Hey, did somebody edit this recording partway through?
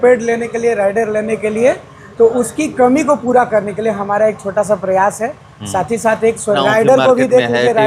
yes; 1 cut; at 6.6 s

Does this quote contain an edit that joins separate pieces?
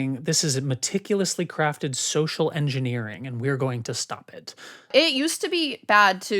yes; 1 cut; at 4.9 s

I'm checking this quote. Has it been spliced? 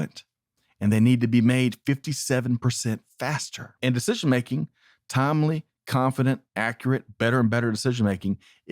yes; 1 cut; at 3.8 s

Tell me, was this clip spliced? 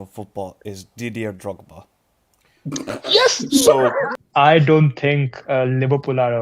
yes; 1 cut; at 4.1 s

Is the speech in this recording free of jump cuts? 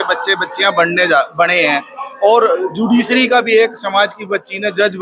yes; 0 cuts

